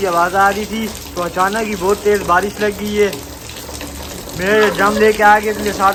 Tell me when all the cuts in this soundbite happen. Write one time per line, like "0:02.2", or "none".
none